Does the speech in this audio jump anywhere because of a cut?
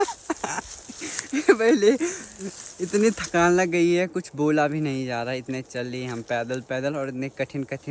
no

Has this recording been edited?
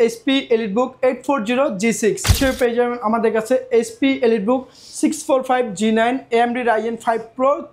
yes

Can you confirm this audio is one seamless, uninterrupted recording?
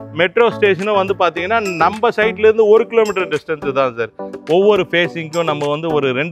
no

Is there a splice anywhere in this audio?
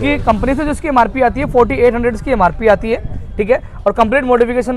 no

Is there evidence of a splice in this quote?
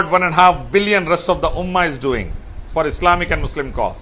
no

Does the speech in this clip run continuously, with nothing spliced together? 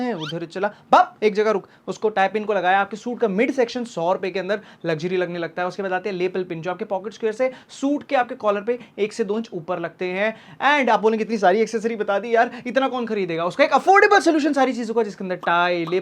yes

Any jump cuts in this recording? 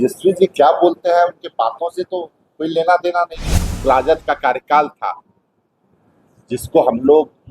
yes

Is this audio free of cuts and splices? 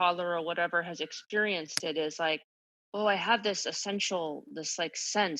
yes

